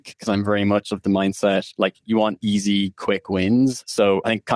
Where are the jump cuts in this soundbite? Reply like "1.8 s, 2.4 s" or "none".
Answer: 1.7 s